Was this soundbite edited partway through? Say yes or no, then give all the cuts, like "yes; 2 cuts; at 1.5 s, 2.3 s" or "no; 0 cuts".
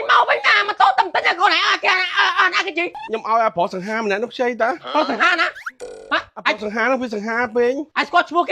yes; 1 cut; at 3.0 s